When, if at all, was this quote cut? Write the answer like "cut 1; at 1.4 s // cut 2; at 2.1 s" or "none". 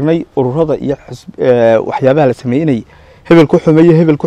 none